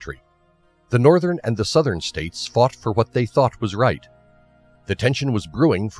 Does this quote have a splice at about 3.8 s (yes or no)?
no